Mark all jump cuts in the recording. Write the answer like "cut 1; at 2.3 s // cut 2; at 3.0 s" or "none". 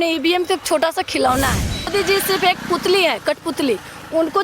cut 1; at 1.9 s